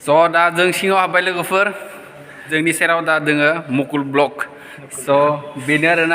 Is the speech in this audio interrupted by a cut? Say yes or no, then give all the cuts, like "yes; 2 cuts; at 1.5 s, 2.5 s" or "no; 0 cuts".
yes; 1 cut; at 2.5 s